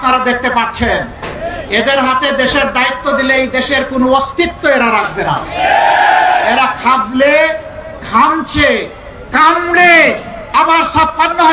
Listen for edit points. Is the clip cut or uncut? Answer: uncut